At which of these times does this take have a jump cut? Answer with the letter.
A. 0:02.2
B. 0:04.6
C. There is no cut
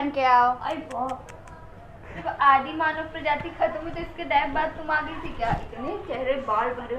A